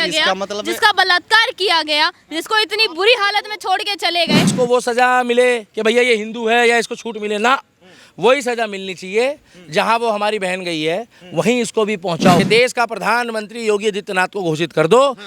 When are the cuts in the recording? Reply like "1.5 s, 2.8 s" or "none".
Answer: 4.5 s, 12.4 s